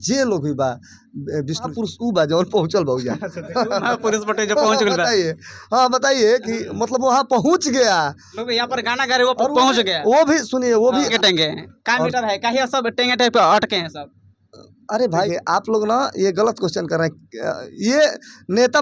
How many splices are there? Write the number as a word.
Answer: three